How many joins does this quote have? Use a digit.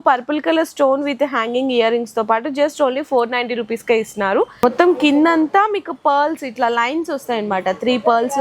1